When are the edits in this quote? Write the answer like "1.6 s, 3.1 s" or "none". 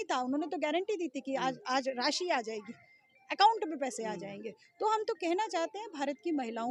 none

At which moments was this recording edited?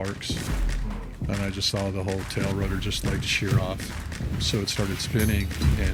none

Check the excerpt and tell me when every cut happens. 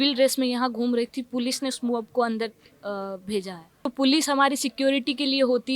3.8 s

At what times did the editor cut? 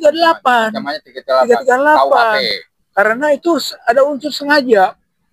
none

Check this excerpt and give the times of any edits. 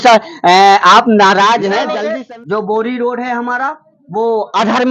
1.9 s

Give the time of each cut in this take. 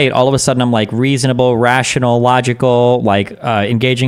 none

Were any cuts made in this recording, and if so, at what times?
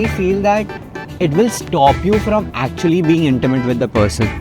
none

